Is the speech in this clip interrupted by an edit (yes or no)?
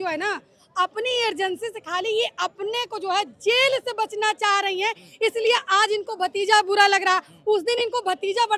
no